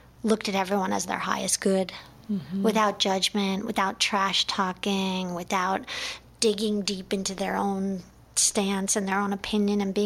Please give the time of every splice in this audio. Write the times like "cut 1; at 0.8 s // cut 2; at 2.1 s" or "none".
none